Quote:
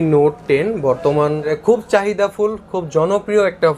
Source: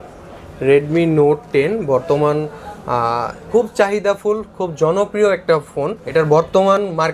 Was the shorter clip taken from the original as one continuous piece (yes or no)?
no